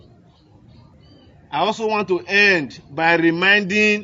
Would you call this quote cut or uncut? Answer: cut